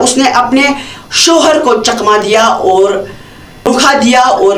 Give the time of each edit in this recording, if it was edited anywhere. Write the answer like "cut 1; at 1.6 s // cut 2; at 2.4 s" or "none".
cut 1; at 3.7 s